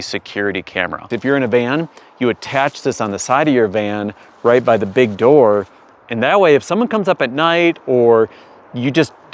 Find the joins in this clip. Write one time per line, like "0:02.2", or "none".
0:01.1